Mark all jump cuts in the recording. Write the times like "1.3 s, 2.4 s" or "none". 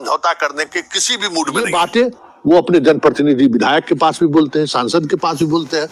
1.7 s